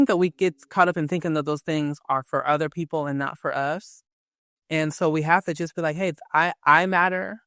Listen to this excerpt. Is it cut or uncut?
uncut